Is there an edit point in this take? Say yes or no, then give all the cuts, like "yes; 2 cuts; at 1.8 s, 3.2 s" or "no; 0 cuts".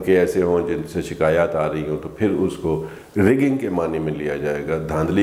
no; 0 cuts